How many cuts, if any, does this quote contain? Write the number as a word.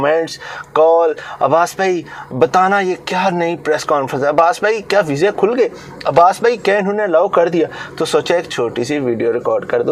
zero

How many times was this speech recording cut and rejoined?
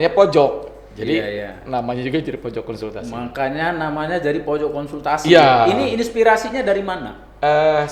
zero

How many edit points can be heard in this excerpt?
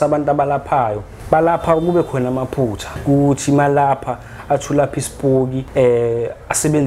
three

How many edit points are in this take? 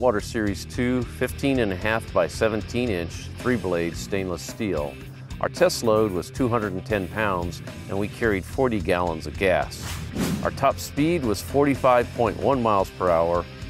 one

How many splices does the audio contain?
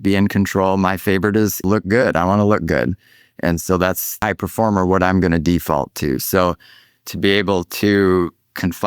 two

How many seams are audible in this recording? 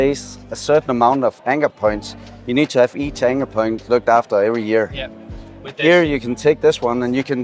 one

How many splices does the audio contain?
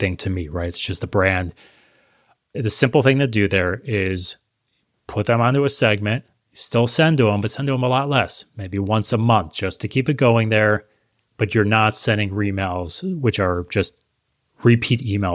one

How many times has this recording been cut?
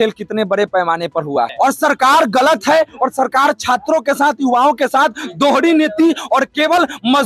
one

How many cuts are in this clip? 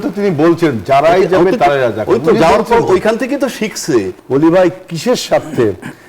one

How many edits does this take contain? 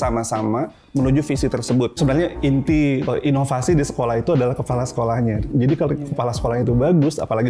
three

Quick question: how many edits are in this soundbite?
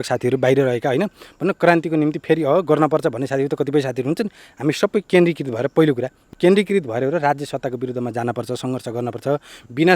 one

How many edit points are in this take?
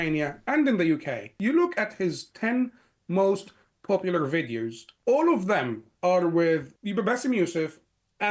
three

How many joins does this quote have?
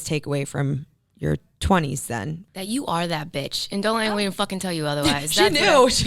one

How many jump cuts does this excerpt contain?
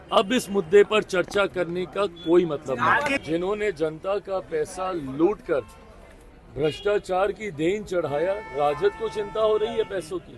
one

